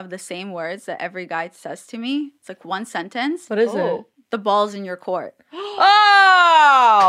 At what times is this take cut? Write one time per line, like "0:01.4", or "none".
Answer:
none